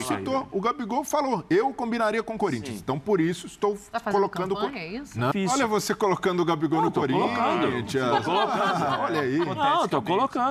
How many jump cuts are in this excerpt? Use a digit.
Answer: 1